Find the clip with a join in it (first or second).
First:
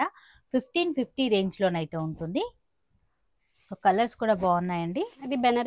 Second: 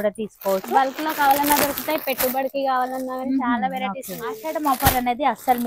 second